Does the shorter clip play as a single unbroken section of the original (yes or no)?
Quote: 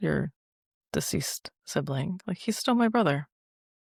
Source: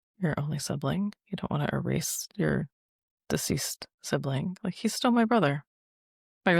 yes